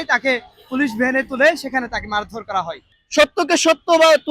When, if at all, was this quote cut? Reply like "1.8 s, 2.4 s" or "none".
3.0 s

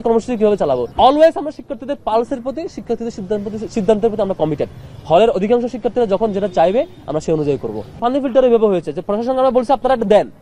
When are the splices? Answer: 0.9 s, 8.0 s

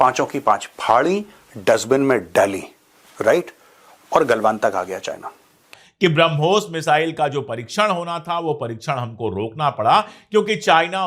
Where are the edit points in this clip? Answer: 5.7 s

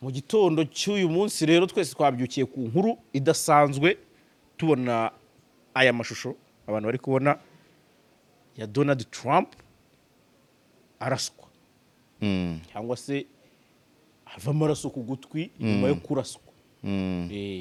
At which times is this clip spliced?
none

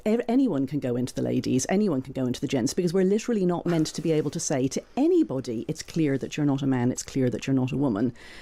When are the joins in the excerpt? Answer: none

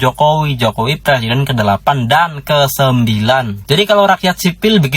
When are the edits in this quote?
3.6 s

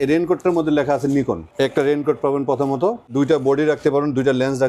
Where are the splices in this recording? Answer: 1.4 s, 3.1 s

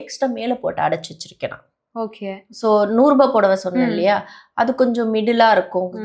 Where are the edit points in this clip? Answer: none

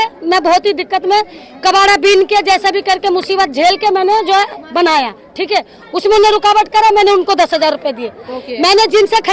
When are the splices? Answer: none

